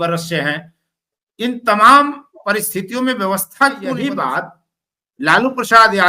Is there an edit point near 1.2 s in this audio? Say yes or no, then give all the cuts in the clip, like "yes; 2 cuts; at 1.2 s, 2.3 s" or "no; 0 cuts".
no; 1 cut; at 4.0 s